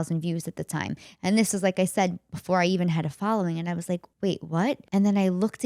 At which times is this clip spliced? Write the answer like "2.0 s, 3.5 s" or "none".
4.1 s, 4.8 s